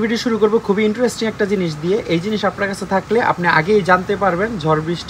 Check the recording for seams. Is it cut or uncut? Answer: uncut